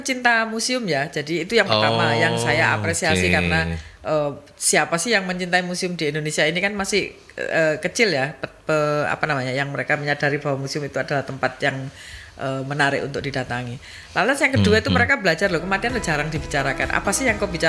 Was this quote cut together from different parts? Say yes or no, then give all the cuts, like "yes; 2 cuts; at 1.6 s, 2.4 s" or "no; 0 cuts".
no; 0 cuts